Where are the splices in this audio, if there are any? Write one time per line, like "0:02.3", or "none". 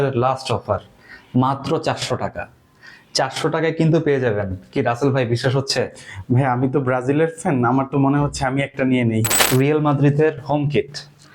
0:09.3